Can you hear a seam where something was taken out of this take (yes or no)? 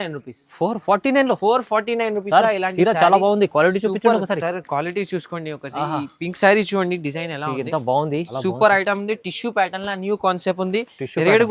yes